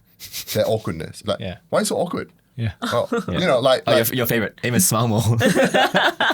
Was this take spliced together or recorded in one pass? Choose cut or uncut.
cut